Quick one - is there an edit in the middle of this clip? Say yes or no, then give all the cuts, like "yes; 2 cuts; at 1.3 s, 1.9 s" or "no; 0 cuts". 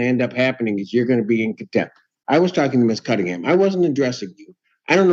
no; 0 cuts